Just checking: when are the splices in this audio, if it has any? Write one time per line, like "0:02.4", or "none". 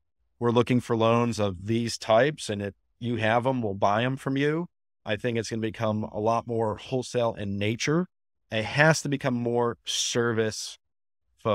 0:08.5